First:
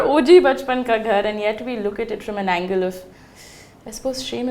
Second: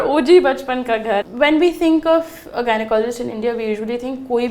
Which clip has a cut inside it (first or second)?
second